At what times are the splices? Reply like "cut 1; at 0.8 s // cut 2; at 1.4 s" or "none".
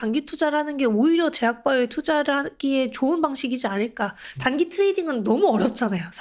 none